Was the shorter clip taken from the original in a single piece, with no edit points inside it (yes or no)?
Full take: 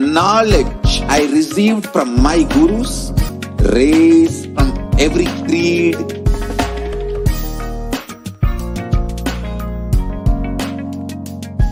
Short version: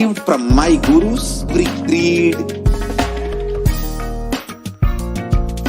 no